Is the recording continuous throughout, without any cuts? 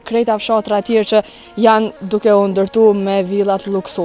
yes; 0 cuts

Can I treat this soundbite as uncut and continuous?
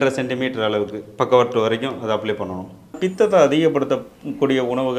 no; 1 cut; at 3.0 s

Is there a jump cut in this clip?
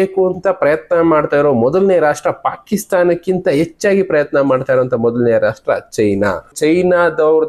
yes; 1 cut; at 6.5 s

